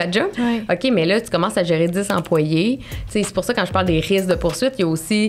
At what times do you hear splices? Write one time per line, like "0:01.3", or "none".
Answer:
none